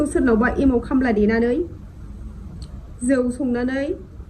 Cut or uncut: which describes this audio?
uncut